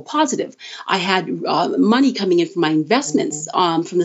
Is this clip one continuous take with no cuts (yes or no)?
yes